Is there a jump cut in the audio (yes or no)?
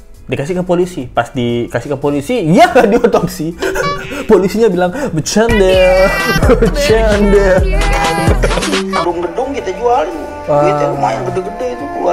yes